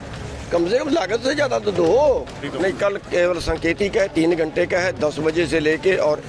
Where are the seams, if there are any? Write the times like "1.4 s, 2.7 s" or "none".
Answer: 2.5 s